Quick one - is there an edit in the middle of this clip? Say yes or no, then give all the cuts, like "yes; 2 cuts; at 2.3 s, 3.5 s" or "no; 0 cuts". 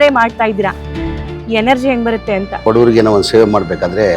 yes; 1 cut; at 2.6 s